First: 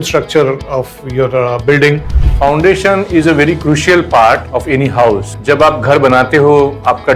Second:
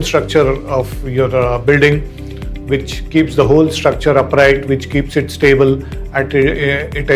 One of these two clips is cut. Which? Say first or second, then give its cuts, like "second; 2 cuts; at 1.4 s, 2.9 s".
first; 2 cuts; at 2.2 s, 5.0 s